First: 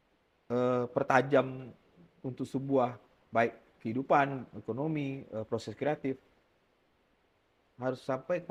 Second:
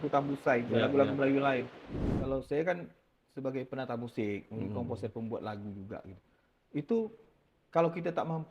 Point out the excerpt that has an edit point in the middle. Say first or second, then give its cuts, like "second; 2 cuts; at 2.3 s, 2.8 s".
second; 1 cut; at 2.1 s